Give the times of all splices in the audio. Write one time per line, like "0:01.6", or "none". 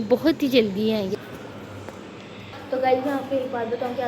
0:01.3
0:02.5